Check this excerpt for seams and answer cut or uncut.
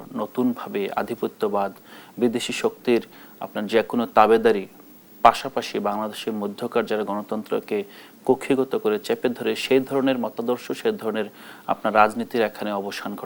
uncut